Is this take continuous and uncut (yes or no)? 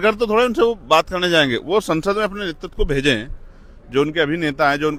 yes